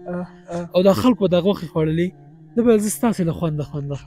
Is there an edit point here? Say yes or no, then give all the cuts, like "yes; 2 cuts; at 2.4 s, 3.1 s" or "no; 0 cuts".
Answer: no; 0 cuts